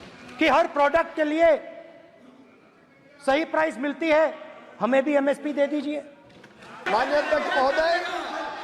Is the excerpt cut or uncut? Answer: cut